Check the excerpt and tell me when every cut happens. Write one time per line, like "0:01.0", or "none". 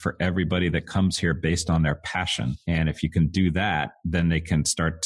0:02.6
0:04.0

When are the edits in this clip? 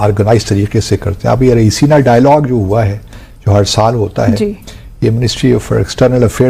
none

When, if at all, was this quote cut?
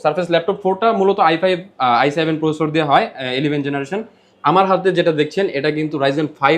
none

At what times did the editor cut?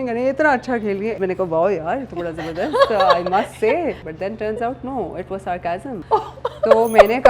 0:01.2
0:04.1
0:06.0

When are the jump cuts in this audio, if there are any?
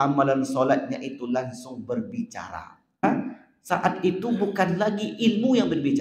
0:03.0

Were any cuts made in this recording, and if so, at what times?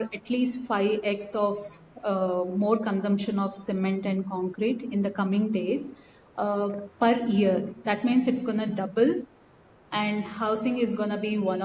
none

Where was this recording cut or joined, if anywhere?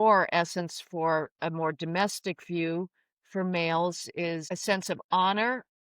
0:04.5

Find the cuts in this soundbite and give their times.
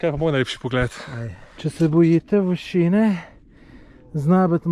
0:01.7

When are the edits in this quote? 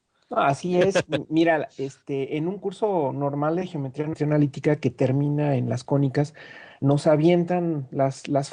none

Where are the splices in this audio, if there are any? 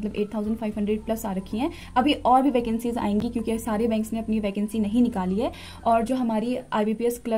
none

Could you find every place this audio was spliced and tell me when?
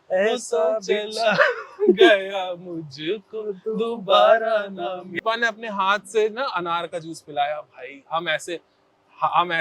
0:05.1

